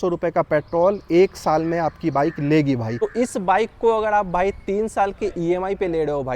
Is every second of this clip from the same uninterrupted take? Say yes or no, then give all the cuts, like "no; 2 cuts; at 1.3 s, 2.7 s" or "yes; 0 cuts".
no; 1 cut; at 2.9 s